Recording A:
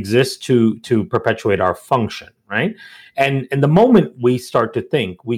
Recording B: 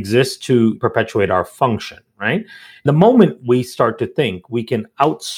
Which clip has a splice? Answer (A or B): B